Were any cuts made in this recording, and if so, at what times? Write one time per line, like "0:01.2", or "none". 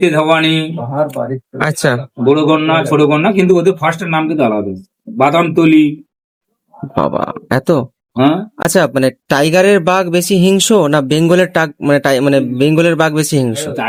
none